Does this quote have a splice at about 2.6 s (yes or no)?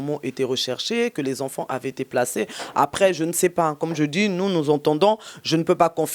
no